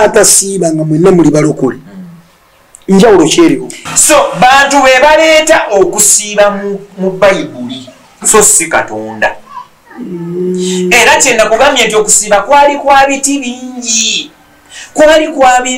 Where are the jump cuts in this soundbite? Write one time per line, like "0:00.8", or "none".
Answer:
0:03.7

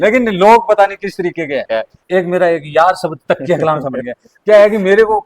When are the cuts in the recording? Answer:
0:01.9

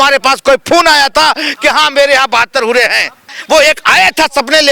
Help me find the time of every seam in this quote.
0:03.3

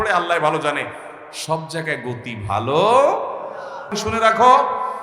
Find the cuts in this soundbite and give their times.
0:03.9

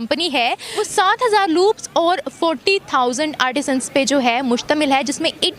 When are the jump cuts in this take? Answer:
0:00.9

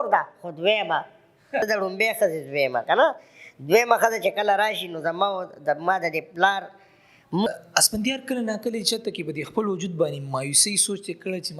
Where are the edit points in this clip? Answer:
0:01.7
0:07.5

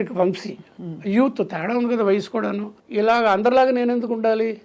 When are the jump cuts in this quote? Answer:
0:02.7

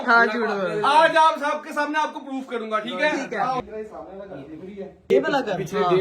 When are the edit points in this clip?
0:03.6
0:04.9

